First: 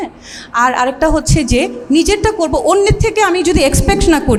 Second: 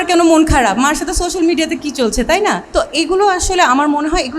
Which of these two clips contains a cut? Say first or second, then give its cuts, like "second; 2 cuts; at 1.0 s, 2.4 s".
second; 1 cut; at 2.6 s